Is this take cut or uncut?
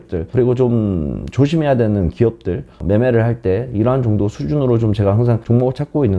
uncut